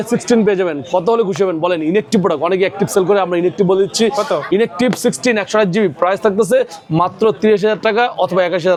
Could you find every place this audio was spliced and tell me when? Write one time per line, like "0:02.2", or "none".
none